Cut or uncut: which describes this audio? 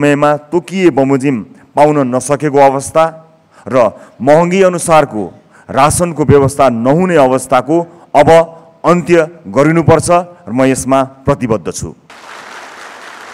cut